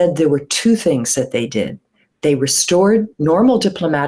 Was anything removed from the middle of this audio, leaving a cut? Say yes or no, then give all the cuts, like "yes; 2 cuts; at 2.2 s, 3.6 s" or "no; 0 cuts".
no; 0 cuts